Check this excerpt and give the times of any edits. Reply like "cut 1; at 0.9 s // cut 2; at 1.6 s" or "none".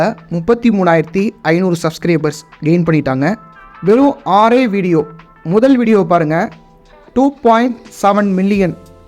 cut 1; at 3.5 s